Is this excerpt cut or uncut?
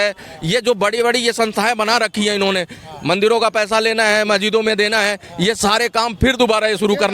uncut